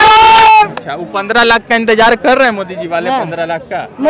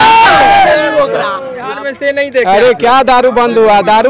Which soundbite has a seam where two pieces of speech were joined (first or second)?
second